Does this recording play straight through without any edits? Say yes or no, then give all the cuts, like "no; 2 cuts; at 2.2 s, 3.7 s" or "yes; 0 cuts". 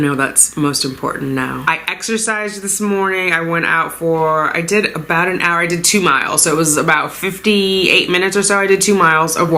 no; 1 cut; at 1.6 s